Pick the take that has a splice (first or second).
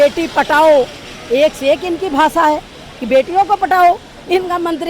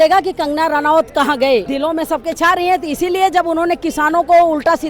second